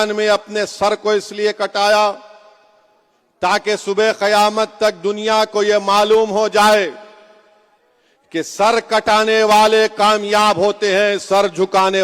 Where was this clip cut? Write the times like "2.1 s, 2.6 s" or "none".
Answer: none